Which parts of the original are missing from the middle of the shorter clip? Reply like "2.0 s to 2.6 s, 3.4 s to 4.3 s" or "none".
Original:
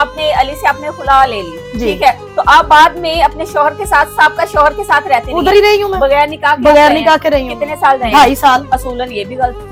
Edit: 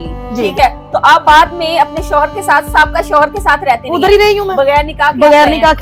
none